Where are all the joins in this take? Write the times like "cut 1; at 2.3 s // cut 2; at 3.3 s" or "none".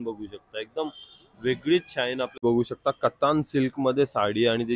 cut 1; at 2.4 s

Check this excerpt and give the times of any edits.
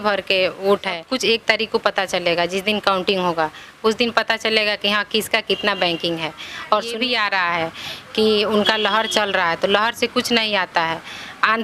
cut 1; at 1.1 s // cut 2; at 6.9 s

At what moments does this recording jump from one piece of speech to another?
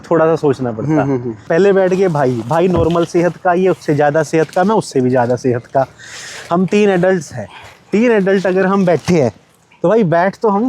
cut 1; at 1.3 s

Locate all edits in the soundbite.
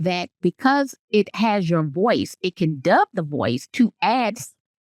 none

